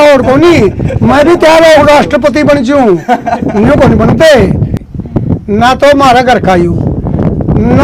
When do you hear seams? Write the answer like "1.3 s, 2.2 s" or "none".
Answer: 4.6 s